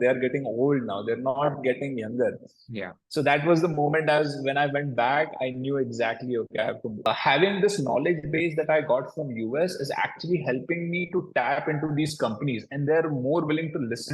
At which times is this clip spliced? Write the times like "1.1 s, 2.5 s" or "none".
7.1 s